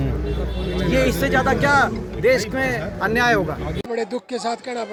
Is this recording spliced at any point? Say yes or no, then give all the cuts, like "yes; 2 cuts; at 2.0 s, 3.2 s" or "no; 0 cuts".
no; 0 cuts